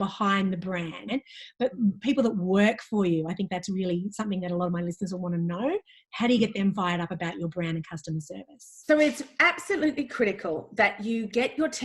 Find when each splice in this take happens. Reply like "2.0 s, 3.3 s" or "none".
1.0 s